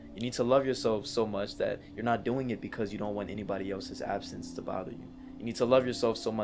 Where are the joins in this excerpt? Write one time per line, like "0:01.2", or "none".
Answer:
none

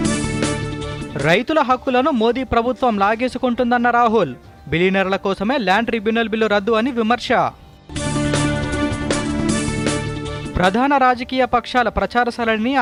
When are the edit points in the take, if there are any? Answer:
none

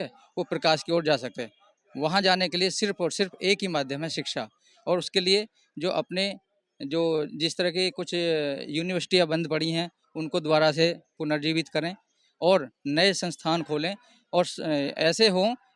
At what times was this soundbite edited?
none

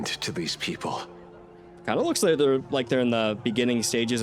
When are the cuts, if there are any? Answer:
0:01.7

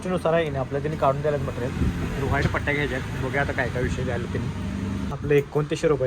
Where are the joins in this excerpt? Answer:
0:05.1

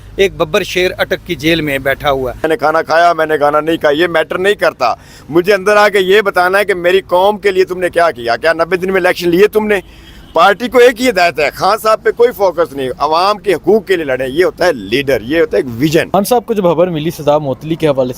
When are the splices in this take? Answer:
0:02.4
0:16.1

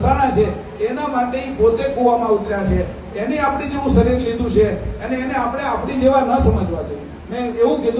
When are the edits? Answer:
none

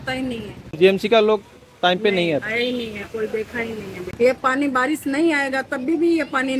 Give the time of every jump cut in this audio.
0:00.8
0:04.1

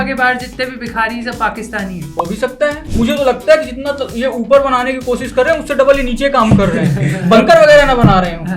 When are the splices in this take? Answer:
0:02.9

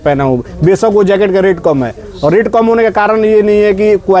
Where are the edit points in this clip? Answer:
none

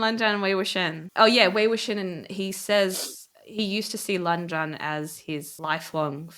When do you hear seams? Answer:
0:01.1

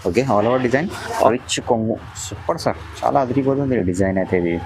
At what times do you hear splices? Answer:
0:01.3

